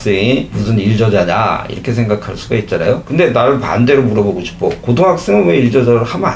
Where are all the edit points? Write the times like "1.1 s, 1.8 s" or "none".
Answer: none